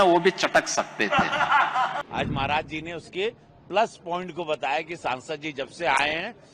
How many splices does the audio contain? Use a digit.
1